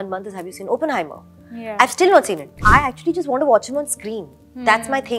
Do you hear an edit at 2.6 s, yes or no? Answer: yes